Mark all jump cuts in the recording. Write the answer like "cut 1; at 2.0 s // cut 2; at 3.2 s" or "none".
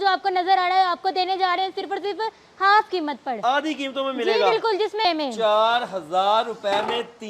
cut 1; at 5.0 s